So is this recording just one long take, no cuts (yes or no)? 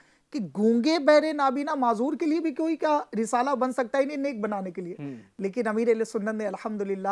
yes